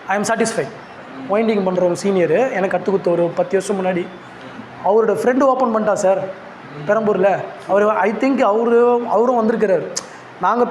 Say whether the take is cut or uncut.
cut